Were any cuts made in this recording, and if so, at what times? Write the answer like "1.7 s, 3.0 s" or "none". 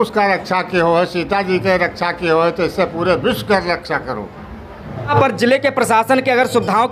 5.1 s